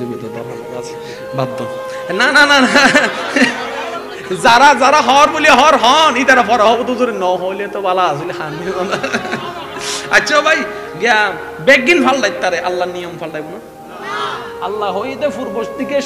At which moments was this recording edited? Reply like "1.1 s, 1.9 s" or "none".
none